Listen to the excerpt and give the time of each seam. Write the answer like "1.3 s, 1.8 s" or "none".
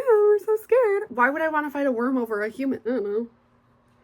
1.1 s, 2.8 s

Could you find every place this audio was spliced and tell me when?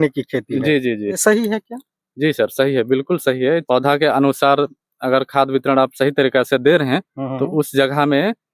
1.2 s, 3.6 s

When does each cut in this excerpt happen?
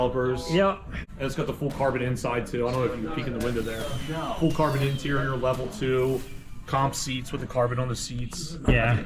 0.9 s

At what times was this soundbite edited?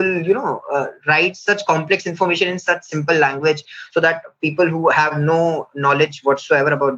5.1 s

